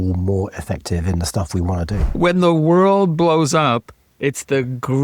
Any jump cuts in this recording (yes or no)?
yes